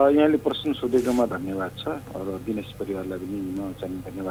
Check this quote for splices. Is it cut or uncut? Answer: uncut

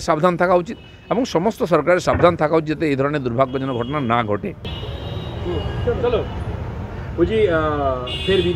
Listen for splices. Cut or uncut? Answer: cut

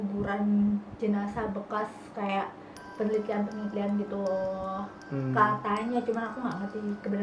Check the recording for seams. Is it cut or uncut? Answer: uncut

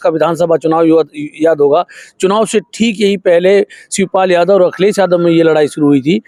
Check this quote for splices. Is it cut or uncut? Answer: uncut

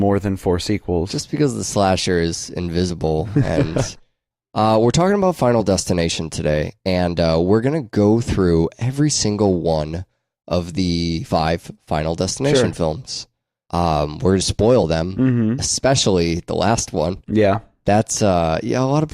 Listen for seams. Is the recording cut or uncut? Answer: uncut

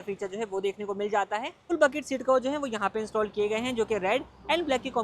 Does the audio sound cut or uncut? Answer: cut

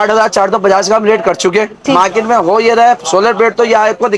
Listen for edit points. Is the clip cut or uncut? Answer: cut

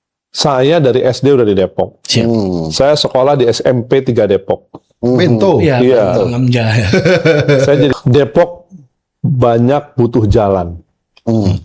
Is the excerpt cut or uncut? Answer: cut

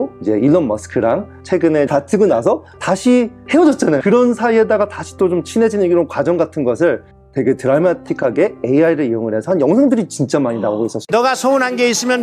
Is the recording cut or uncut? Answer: uncut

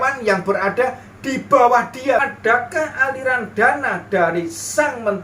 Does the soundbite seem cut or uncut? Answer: cut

